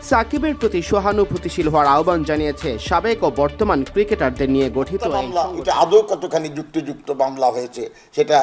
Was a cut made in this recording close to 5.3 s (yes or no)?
yes